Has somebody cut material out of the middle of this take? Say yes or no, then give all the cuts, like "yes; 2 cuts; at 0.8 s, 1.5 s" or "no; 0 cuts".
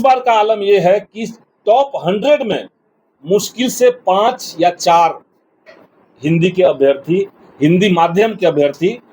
no; 0 cuts